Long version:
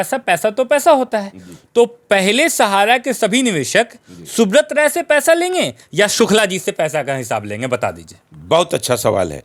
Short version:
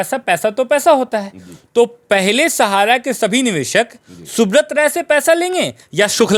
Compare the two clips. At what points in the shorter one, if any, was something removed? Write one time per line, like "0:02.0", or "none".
none